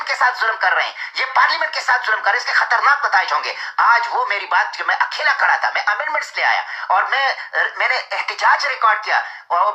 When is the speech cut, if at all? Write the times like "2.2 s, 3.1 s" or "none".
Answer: none